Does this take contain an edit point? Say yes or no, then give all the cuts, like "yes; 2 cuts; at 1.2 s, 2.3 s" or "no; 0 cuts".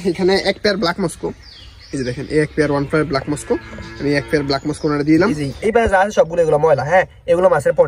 yes; 1 cut; at 5.5 s